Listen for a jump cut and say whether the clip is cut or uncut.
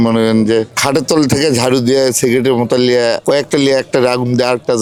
uncut